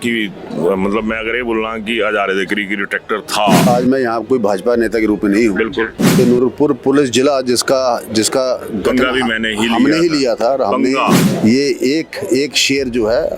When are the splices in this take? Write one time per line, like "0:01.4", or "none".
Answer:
0:03.7
0:06.2
0:11.3